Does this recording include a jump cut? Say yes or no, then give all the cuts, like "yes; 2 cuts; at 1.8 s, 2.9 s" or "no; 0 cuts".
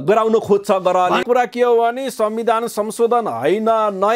yes; 1 cut; at 1.2 s